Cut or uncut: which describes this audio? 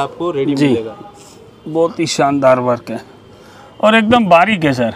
uncut